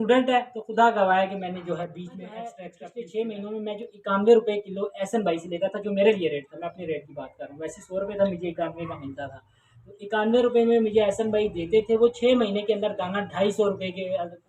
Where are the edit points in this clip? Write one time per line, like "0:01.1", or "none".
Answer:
0:02.7